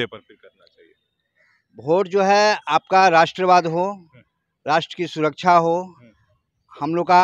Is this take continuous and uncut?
yes; 0 cuts

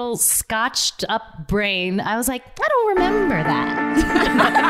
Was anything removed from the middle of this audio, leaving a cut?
no; 0 cuts

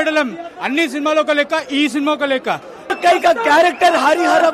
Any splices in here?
yes; 1 cut; at 2.9 s

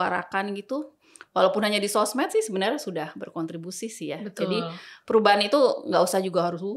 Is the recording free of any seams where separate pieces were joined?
yes; 0 cuts

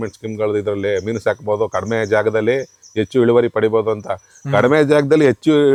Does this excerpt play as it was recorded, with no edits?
yes; 0 cuts

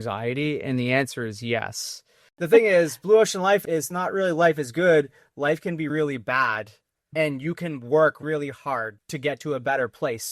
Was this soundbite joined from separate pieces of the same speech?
yes; 3 cuts; at 2.3 s, 3.6 s, 9.0 s

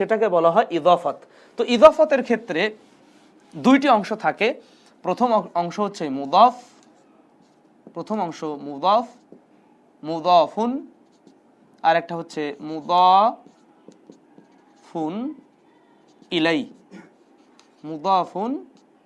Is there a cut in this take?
no; 0 cuts

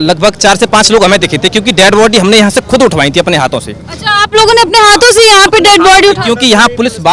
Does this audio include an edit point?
no; 0 cuts

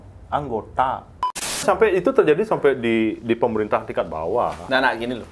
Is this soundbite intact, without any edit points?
no; 1 cut; at 1.6 s

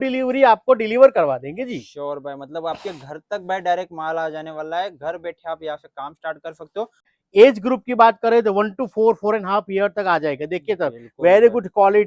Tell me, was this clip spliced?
yes; 1 cut; at 7.1 s

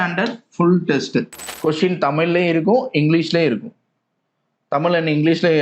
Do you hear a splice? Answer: yes; 1 cut; at 1.4 s

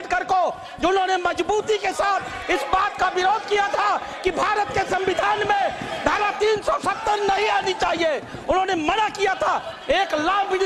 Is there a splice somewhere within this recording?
no; 0 cuts

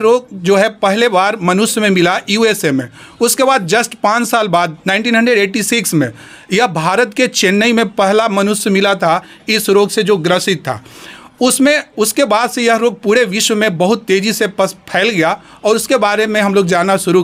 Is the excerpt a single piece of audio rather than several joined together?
yes; 0 cuts

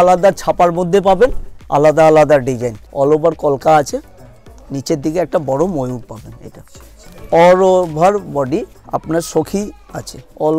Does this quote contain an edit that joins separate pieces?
yes; 2 cuts; at 2.8 s, 7.0 s

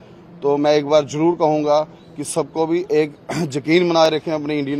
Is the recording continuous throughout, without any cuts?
yes; 0 cuts

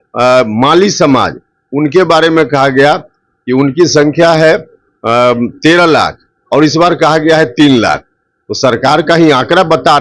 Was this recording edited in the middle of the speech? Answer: no; 0 cuts

